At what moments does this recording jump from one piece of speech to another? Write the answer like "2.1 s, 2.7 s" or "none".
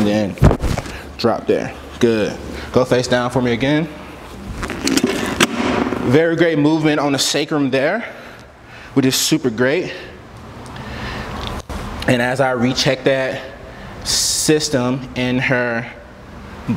none